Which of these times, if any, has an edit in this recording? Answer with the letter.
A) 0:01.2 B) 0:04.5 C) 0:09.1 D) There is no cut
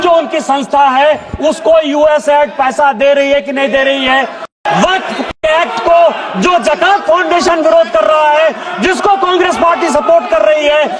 B